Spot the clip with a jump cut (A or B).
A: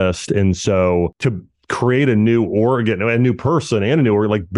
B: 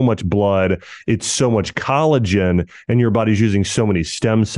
A